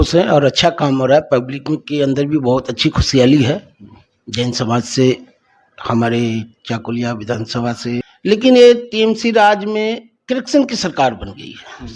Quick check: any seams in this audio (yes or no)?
yes